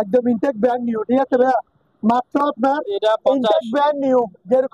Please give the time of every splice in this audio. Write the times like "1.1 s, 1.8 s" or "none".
3.0 s